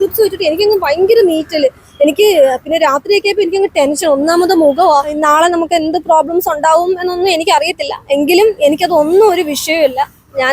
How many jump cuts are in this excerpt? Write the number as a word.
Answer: one